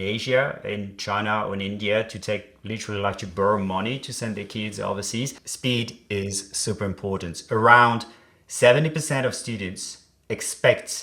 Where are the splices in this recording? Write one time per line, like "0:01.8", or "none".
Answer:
0:05.4

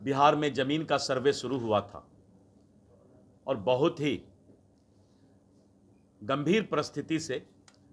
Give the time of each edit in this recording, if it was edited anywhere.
none

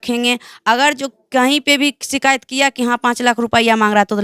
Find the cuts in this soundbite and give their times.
none

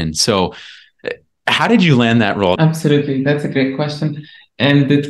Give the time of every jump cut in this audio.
0:02.6

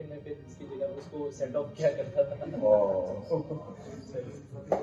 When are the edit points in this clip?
none

